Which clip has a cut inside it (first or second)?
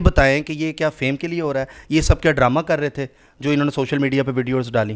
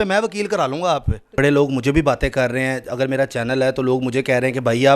second